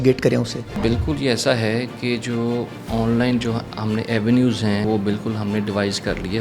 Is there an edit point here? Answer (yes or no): yes